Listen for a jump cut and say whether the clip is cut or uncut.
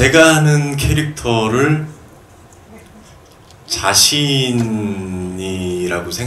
uncut